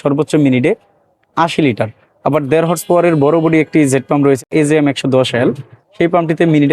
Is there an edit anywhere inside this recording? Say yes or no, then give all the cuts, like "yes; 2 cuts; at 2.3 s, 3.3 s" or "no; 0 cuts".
yes; 1 cut; at 4.4 s